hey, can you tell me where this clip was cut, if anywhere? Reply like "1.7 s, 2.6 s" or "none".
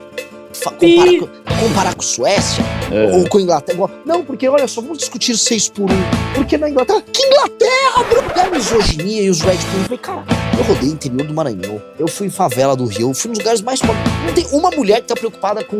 8.2 s